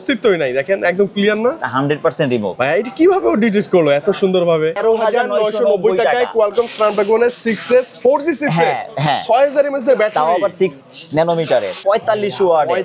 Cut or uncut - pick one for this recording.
cut